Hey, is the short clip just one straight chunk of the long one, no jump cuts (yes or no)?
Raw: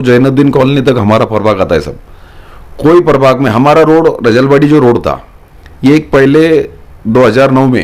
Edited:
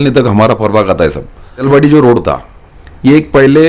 no